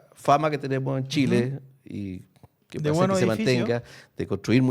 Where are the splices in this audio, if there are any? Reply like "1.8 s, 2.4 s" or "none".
none